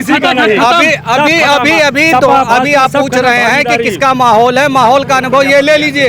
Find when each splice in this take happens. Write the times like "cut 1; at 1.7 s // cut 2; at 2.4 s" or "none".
none